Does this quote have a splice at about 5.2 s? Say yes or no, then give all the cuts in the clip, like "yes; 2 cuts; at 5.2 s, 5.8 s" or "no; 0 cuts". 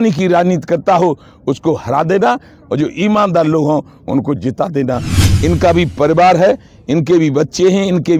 yes; 1 cut; at 5.2 s